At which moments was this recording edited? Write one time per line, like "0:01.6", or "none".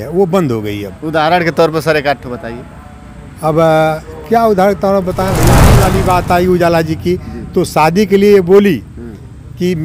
0:05.7